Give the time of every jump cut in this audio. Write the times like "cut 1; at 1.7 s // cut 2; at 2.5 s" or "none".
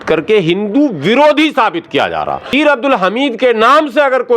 cut 1; at 2.5 s